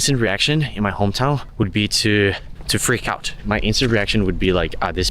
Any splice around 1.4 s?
no; 1 cut; at 3.4 s

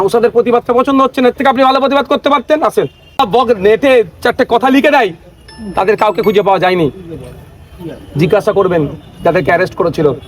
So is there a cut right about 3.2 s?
yes; 1 cut; at 3.2 s

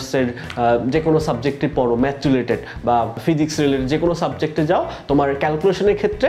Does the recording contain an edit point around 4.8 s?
no; 1 cut; at 3.2 s

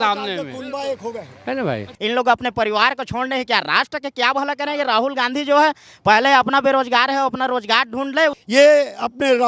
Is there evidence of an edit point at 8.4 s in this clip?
yes; 2 cuts; at 1.9 s, 8.4 s

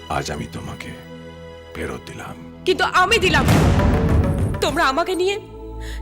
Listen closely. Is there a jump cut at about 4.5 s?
yes; 1 cut; at 4.5 s

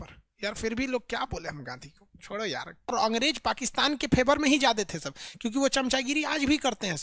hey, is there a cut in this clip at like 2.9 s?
yes; 1 cut; at 2.9 s

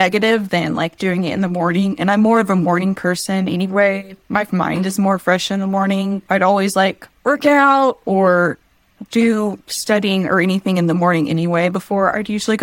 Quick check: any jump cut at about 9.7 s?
no; 1 cut; at 6.2 s

